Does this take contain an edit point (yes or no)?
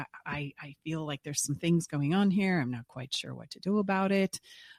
no